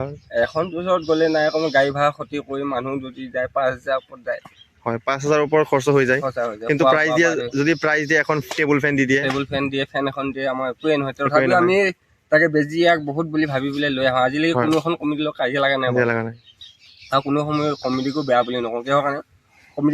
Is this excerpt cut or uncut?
uncut